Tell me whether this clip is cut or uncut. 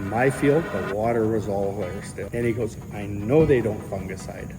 cut